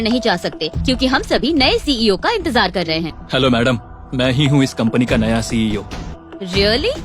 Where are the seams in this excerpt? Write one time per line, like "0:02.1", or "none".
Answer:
0:03.2
0:06.1